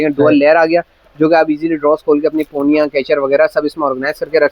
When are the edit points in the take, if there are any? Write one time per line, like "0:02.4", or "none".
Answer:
none

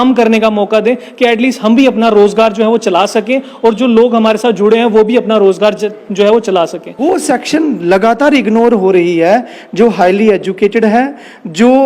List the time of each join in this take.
0:07.0

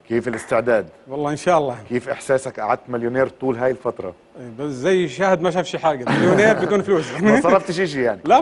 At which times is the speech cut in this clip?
0:03.6

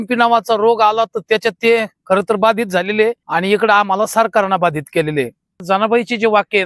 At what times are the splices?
0:03.2
0:05.6

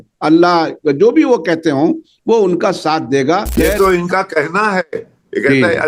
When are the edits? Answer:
0:03.5

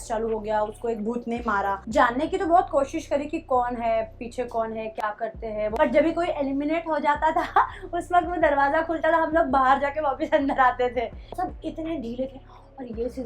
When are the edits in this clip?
0:01.8
0:05.7
0:11.3

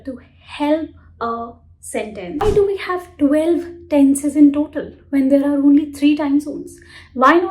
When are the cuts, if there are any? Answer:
0:02.4

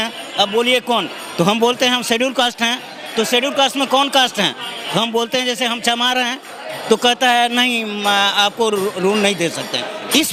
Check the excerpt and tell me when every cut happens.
none

